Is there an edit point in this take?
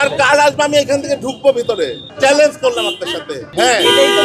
yes; 2 cuts; at 2.0 s, 3.5 s

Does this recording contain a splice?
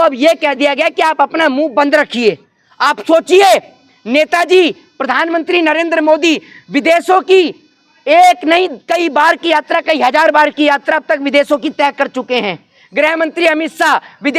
no; 0 cuts

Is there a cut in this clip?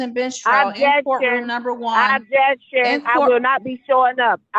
no; 0 cuts

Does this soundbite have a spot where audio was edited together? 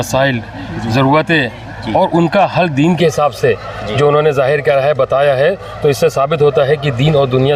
no; 0 cuts

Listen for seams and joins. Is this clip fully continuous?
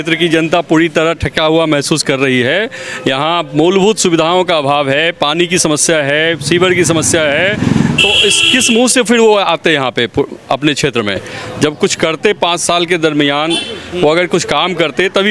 yes; 0 cuts

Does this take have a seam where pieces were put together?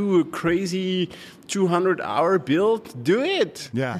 no; 0 cuts

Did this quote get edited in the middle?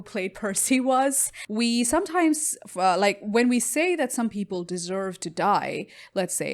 yes; 1 cut; at 1.4 s

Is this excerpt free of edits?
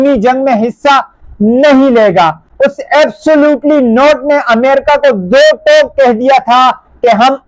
yes; 0 cuts

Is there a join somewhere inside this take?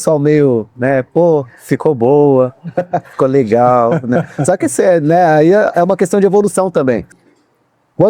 yes; 1 cut; at 7.1 s

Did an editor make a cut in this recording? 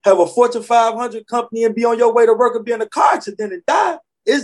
no; 0 cuts

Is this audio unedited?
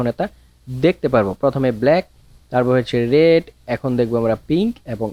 yes; 0 cuts

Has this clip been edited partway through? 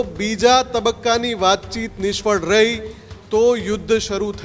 no; 0 cuts

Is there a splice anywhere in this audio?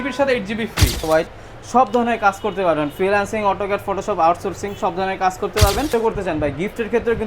yes; 2 cuts; at 1.0 s, 5.9 s

